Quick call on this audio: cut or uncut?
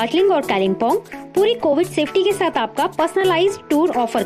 uncut